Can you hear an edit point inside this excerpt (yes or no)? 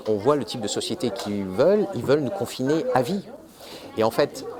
no